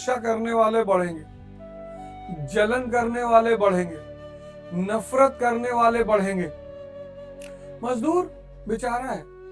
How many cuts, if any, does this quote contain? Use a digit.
2